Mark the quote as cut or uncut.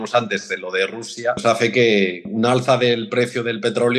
cut